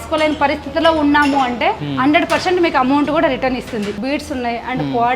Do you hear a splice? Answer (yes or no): yes